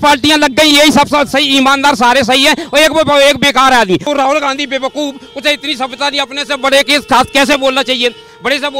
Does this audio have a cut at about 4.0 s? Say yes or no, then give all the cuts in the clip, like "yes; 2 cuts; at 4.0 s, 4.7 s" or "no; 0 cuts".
yes; 1 cut; at 4.0 s